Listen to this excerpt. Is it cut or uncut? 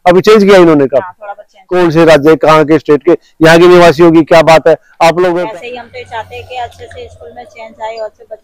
cut